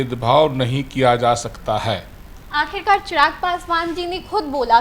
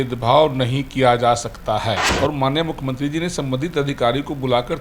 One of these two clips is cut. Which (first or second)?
second